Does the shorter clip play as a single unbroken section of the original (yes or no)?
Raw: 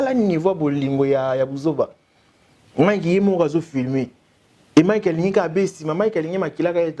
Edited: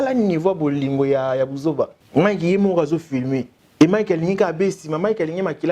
no